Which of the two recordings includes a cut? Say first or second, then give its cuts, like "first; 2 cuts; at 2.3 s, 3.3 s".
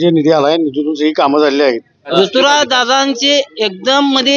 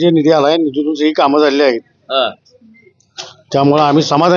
first; 1 cut; at 2.1 s